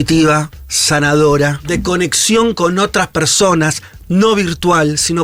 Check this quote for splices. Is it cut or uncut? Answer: cut